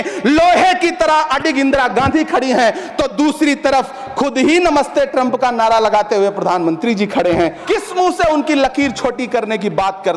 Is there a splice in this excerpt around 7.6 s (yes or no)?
yes